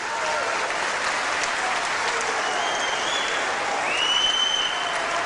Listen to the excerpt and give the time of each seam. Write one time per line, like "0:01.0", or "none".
0:04.1